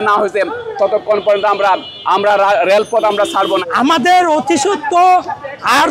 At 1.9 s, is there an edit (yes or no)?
no